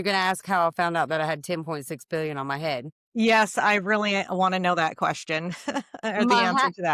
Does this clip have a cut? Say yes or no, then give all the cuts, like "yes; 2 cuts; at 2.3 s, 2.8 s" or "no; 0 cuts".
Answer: no; 0 cuts